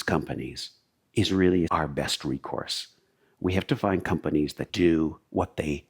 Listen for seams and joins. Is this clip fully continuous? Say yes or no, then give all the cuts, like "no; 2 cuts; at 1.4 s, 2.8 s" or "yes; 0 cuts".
no; 2 cuts; at 1.7 s, 4.6 s